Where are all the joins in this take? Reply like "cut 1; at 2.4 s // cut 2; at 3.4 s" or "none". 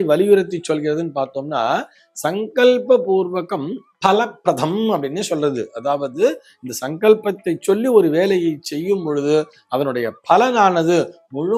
none